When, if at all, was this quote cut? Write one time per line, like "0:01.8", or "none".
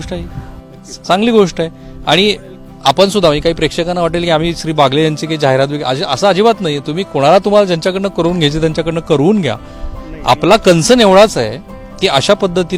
none